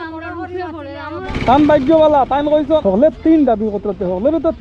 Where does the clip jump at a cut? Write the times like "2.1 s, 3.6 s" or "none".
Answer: 1.2 s, 2.8 s